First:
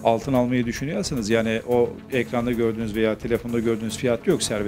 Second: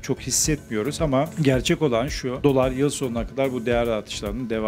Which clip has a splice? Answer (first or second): second